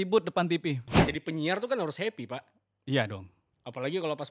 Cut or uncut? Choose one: cut